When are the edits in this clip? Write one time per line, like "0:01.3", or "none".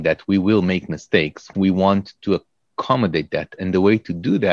0:01.5